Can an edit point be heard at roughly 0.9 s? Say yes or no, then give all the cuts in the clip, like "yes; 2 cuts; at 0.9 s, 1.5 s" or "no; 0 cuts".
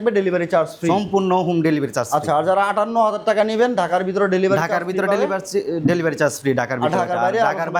no; 0 cuts